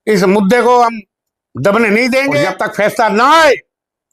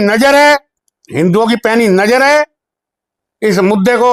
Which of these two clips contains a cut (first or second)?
first